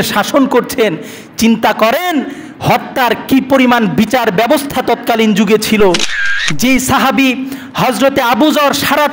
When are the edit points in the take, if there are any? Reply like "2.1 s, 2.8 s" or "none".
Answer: 6.3 s

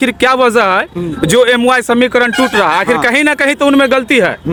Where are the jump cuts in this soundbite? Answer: none

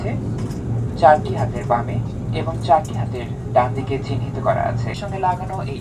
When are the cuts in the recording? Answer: 4.9 s

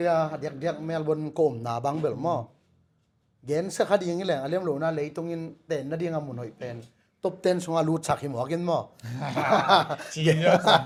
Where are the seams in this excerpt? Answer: none

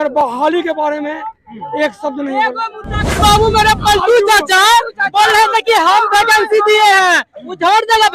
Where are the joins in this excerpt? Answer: 3.2 s

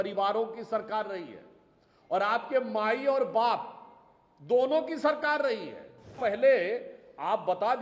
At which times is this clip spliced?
6.2 s

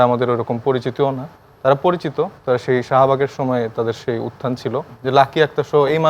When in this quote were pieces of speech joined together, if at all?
4.9 s

